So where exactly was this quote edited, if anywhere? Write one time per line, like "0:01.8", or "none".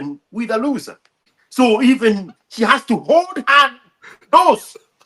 0:01.4